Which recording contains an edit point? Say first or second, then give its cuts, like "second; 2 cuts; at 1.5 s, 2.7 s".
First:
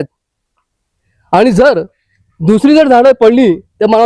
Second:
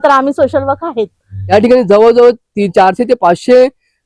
second; 1 cut; at 1.3 s